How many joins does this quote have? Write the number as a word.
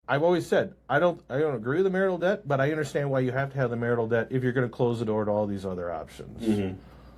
zero